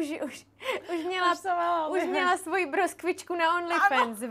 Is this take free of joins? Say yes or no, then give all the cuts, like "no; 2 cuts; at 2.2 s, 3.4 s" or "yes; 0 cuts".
yes; 0 cuts